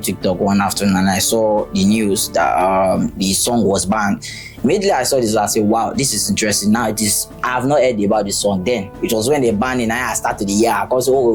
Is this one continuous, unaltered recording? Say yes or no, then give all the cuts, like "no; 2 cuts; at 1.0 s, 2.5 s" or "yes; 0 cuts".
yes; 0 cuts